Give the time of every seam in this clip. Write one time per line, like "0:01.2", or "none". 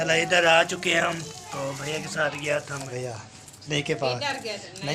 0:02.9